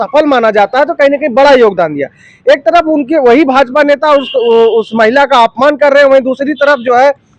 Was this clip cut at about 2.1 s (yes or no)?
no